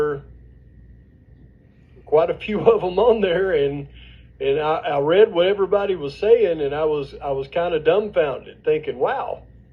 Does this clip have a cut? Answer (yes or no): no